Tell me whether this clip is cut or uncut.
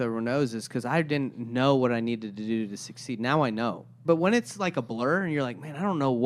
cut